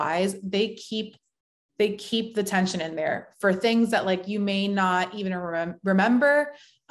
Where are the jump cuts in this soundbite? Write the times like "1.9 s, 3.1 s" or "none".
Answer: none